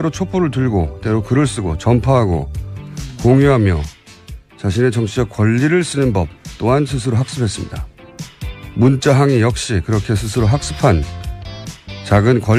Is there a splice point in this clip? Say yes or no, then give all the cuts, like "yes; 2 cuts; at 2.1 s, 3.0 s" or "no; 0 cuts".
no; 0 cuts